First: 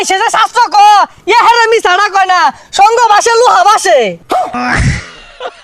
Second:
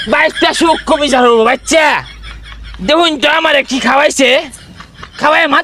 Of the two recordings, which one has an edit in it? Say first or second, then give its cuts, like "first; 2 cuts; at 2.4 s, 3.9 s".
first; 1 cut; at 4.6 s